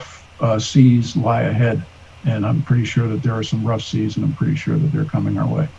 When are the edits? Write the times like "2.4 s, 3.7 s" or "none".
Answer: none

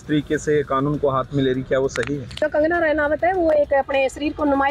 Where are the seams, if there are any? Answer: 2.4 s

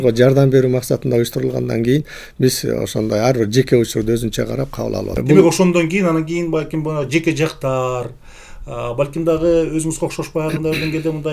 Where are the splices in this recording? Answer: 5.2 s

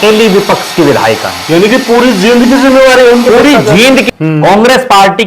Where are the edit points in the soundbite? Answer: 4.1 s

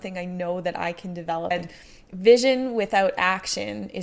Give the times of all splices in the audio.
1.5 s

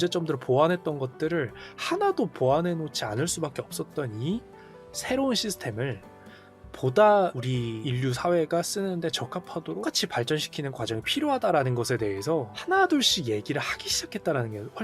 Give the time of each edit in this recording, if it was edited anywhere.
7.4 s

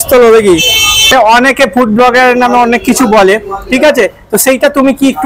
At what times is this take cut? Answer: 1.1 s

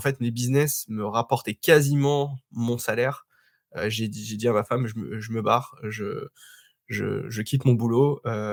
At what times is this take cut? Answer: none

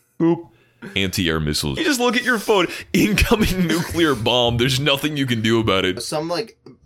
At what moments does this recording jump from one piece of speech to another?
1.8 s, 6.0 s

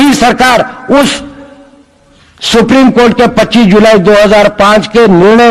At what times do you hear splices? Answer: none

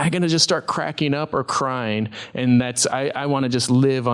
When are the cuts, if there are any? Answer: none

